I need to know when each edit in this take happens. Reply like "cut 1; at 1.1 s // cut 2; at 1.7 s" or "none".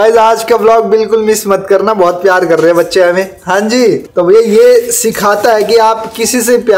none

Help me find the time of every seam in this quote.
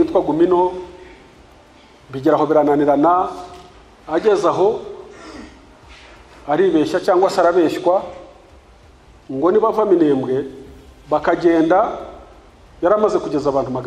none

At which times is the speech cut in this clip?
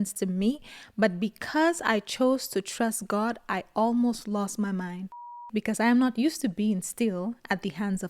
cut 1; at 5.5 s

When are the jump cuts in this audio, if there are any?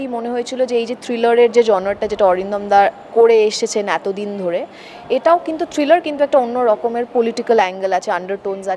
none

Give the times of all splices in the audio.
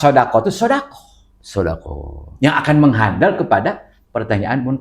none

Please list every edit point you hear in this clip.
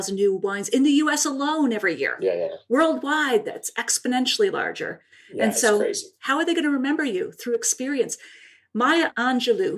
none

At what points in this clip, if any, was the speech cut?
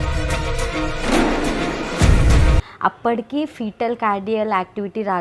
cut 1; at 2.7 s

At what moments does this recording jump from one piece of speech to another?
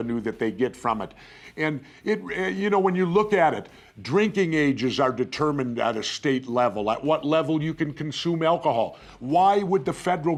none

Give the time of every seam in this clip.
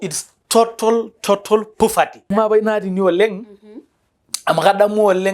cut 1; at 2.3 s

